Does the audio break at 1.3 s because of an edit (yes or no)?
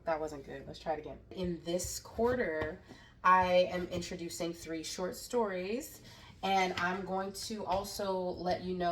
yes